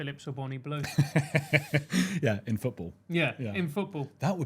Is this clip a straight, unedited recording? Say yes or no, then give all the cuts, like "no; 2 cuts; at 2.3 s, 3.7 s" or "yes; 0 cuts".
yes; 0 cuts